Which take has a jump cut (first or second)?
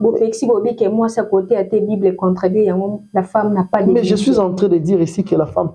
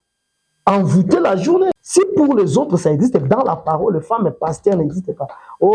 second